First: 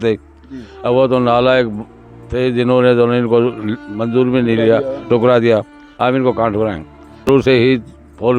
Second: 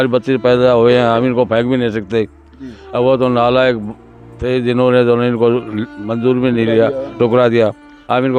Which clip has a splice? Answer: first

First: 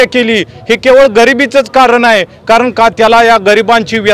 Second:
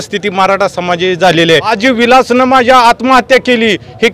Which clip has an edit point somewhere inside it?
second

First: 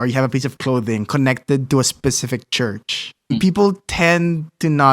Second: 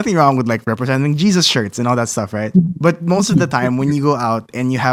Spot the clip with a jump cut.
first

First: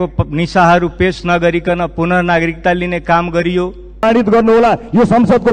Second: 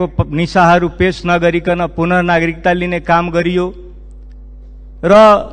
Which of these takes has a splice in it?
first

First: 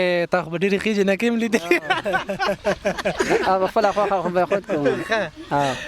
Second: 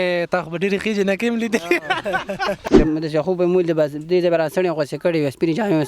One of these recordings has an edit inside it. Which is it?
second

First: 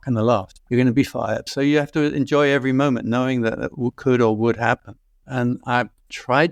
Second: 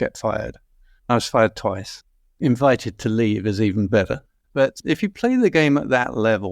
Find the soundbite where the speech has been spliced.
second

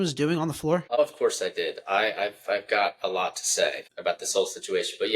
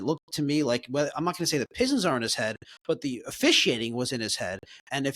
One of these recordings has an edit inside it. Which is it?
first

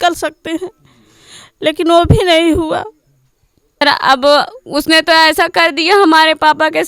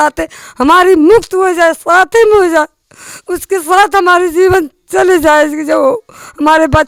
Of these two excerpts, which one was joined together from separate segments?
first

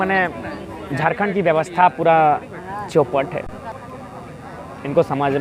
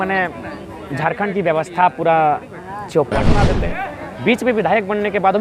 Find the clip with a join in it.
second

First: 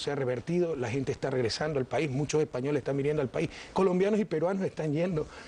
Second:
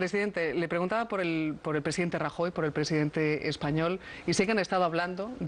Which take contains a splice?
first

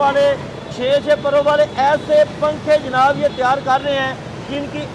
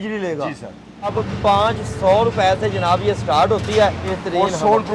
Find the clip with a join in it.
second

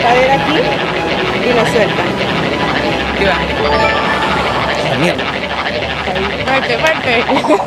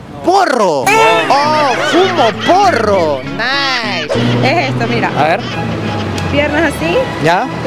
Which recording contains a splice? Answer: second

